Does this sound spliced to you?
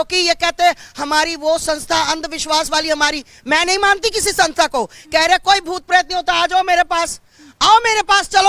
no; 0 cuts

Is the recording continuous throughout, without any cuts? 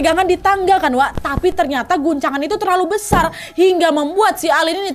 yes; 0 cuts

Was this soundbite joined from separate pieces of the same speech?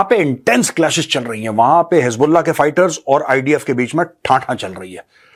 no; 0 cuts

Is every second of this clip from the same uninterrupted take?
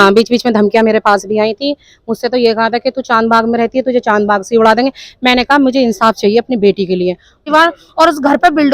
no; 1 cut; at 7.5 s

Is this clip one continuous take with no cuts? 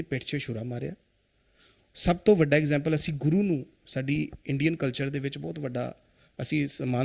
yes; 0 cuts

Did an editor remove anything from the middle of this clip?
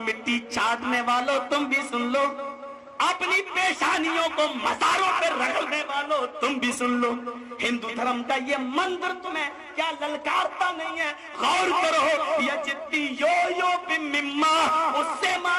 no; 0 cuts

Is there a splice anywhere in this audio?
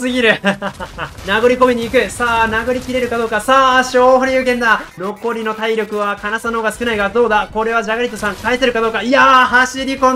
yes; 2 cuts; at 1.2 s, 4.9 s

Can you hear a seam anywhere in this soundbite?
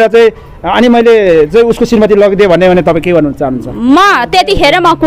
no; 0 cuts

